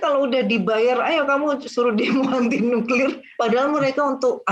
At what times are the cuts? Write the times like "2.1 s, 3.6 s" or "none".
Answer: 3.3 s